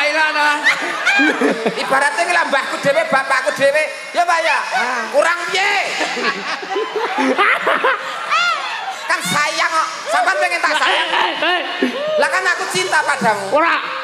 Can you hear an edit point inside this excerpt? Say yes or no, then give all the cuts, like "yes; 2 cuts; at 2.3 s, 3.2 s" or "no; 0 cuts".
yes; 1 cut; at 1.5 s